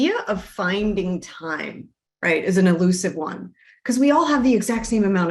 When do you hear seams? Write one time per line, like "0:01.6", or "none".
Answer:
none